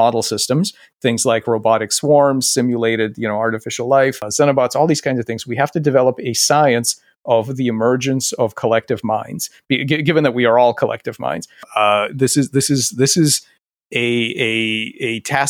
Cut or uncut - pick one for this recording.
cut